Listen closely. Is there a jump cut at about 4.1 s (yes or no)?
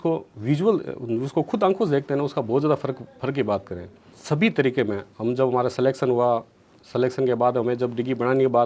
yes